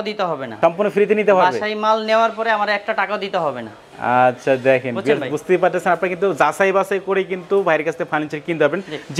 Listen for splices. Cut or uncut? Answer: uncut